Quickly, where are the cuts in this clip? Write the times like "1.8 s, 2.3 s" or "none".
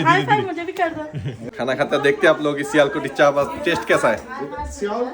1.4 s